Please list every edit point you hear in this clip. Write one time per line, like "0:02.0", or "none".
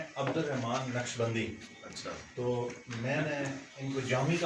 none